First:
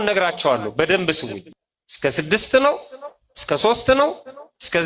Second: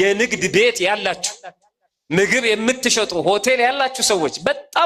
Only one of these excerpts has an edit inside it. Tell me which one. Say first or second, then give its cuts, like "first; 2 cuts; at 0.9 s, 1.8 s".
first; 1 cut; at 1.4 s